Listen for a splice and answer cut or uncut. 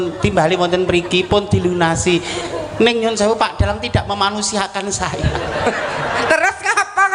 uncut